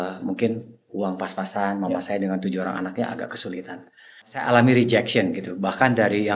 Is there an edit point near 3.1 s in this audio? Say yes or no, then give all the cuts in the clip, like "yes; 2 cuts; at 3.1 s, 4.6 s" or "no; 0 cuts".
no; 1 cut; at 4.5 s